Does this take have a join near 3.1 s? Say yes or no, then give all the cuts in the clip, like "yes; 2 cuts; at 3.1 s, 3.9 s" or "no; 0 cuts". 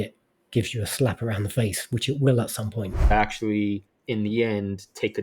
yes; 1 cut; at 3.1 s